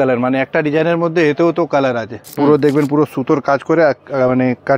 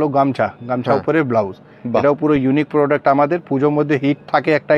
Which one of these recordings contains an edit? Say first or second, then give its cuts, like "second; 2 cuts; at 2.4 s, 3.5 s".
first; 1 cut; at 2.2 s